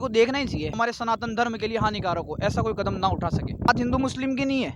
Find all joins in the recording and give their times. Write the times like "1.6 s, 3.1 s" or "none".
0.8 s, 3.7 s